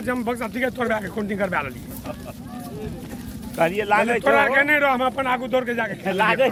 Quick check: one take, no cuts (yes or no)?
yes